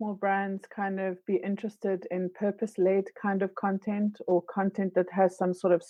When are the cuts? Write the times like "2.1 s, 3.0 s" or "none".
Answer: none